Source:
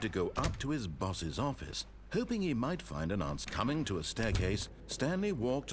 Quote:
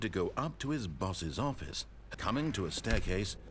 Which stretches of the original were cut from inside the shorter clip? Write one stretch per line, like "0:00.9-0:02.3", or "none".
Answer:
0:02.0-0:03.4